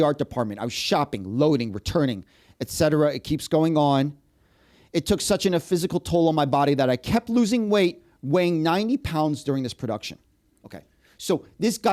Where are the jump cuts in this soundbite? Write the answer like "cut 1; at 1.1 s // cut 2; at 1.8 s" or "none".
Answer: none